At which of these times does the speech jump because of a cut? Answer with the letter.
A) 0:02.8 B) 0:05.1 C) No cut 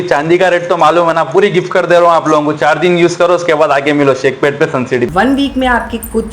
B